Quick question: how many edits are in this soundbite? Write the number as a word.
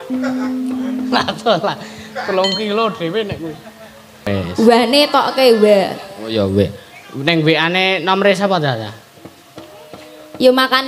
one